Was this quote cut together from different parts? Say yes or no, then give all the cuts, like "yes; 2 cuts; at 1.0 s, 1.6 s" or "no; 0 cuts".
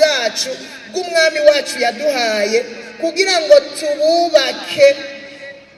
no; 0 cuts